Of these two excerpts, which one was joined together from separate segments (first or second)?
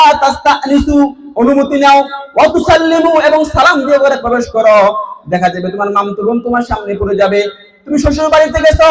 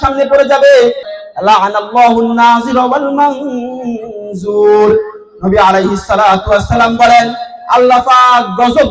second